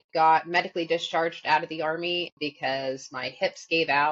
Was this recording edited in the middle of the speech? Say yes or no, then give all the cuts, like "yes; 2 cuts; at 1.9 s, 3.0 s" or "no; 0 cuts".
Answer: yes; 1 cut; at 2.3 s